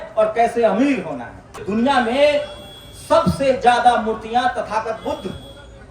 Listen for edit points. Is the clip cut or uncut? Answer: cut